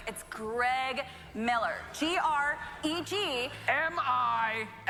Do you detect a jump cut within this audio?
no; 0 cuts

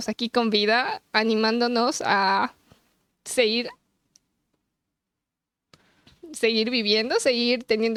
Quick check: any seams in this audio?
no; 0 cuts

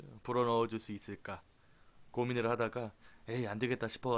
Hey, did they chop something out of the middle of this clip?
yes; 1 cut; at 1.4 s

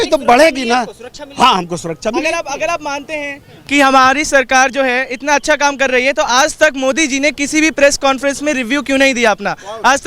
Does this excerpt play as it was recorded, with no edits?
yes; 0 cuts

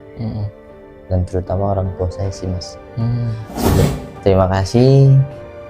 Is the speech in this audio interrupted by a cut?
yes; 1 cut; at 3.9 s

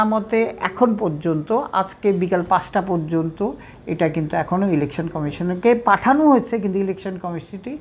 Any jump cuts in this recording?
no; 0 cuts

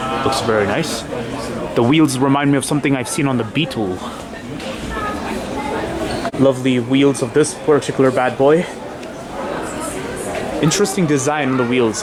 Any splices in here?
no; 0 cuts

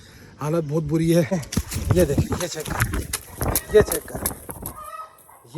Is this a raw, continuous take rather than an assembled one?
no; 1 cut; at 1.4 s

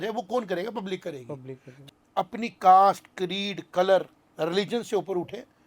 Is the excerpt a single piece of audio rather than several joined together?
no; 1 cut; at 1.7 s

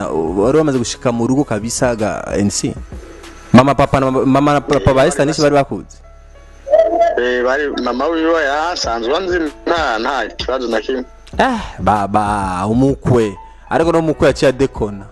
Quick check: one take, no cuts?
yes; 0 cuts

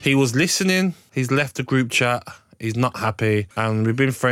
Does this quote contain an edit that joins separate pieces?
yes; 2 cuts; at 1.0 s, 3.5 s

